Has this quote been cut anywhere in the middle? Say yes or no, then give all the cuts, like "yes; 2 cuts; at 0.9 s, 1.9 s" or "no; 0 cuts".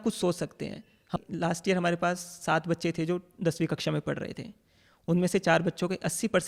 yes; 1 cut; at 1.1 s